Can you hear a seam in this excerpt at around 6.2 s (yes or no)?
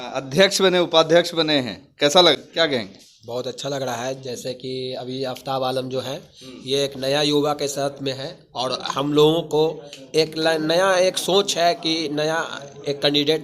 no